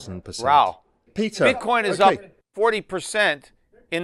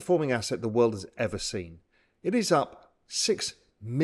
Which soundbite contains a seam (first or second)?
first